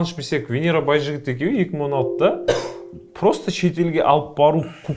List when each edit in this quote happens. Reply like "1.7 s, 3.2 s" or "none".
none